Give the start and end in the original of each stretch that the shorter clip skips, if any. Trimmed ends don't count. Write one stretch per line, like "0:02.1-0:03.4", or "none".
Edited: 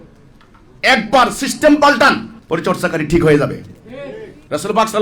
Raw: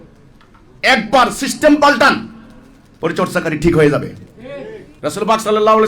0:02.3-0:02.8